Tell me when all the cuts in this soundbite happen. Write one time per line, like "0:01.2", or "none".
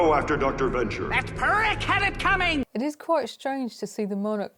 0:02.7